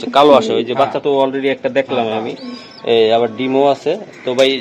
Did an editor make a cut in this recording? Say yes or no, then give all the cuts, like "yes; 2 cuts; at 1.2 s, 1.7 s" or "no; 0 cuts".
no; 0 cuts